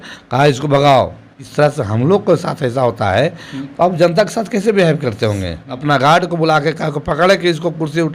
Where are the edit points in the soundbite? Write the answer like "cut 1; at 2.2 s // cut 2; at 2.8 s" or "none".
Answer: cut 1; at 1.4 s // cut 2; at 5.8 s